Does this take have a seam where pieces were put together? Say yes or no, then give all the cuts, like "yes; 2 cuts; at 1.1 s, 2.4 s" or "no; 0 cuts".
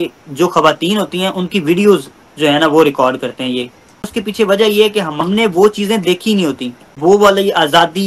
yes; 3 cuts; at 4.1 s, 5.2 s, 6.9 s